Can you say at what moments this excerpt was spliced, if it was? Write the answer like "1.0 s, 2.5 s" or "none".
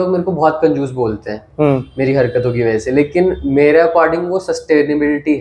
none